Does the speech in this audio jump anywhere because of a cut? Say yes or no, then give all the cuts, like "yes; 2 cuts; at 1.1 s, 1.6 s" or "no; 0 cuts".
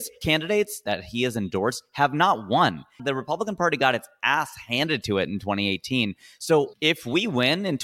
yes; 2 cuts; at 3.0 s, 6.7 s